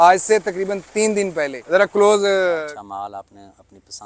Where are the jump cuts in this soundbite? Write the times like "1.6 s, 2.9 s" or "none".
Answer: 2.6 s